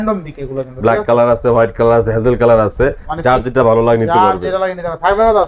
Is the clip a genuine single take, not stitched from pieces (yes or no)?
yes